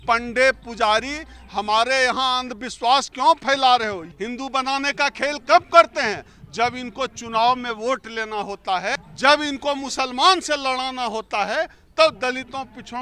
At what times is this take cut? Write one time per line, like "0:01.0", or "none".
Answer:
0:04.0
0:08.9